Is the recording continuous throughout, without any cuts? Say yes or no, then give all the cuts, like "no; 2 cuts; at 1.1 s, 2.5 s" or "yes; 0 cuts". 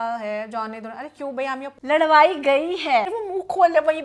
no; 2 cuts; at 1.7 s, 3.1 s